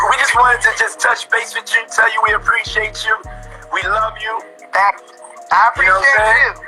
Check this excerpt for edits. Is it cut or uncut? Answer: uncut